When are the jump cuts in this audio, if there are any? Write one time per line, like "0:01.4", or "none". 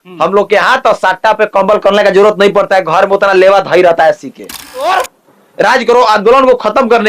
0:04.9